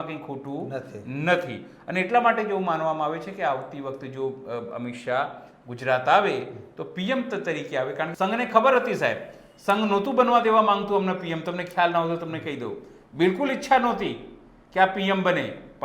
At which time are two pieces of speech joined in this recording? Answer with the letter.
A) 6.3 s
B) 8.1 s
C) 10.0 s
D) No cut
B